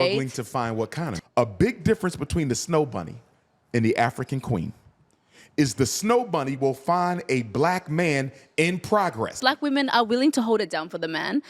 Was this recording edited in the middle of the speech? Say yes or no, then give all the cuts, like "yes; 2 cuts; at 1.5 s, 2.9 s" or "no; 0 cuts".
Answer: yes; 2 cuts; at 1.0 s, 9.4 s